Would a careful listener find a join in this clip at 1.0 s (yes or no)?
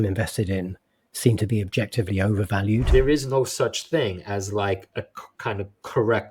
no